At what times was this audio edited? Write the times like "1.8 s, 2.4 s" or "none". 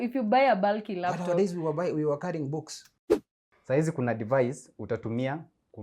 2.9 s